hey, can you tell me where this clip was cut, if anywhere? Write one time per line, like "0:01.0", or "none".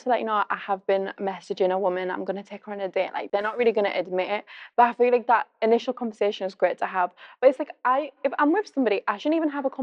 none

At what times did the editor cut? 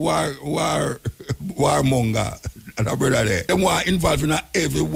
0:03.4

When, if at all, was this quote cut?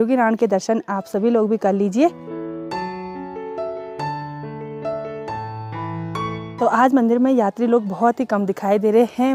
none

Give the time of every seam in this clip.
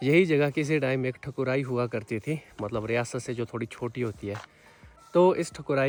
none

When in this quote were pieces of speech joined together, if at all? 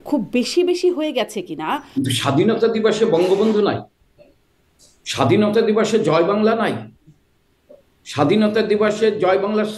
0:01.8

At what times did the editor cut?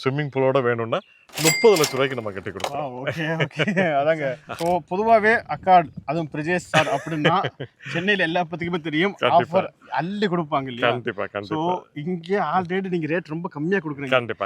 0:04.5

